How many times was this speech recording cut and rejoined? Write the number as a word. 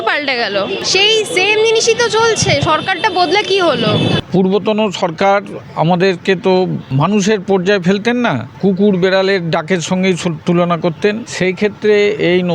five